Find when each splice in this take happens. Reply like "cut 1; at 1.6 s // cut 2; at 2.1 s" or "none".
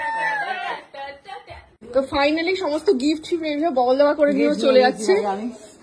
cut 1; at 1.8 s